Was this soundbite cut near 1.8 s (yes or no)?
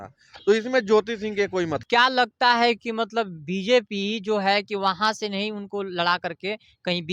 yes